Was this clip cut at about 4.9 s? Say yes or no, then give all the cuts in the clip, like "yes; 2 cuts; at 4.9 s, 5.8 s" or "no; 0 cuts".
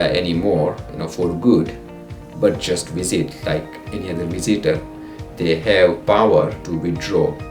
no; 2 cuts; at 0.8 s, 6.6 s